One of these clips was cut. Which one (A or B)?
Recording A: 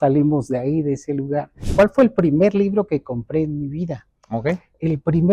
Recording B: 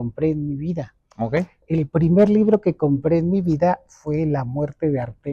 A